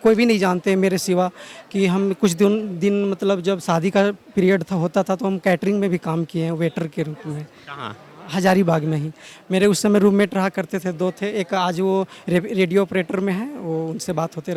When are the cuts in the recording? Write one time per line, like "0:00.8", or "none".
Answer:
none